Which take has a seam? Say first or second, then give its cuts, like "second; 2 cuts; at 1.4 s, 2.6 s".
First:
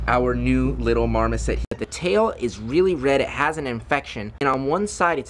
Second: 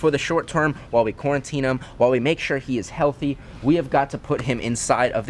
first; 2 cuts; at 1.6 s, 4.6 s